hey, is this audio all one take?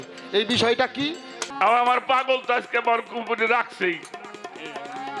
no; 1 cut; at 1.4 s

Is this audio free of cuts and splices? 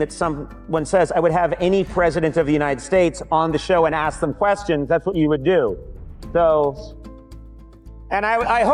yes; 0 cuts

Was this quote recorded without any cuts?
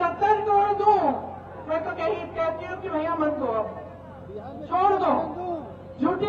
yes; 0 cuts

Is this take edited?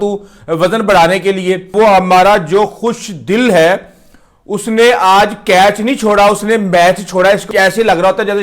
yes; 2 cuts; at 1.7 s, 7.5 s

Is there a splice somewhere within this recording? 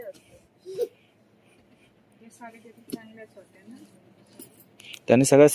no; 0 cuts

